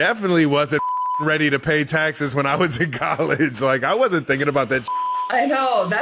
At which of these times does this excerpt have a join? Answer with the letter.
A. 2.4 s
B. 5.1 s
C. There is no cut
B